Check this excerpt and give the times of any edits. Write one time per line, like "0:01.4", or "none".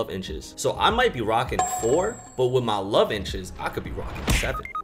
none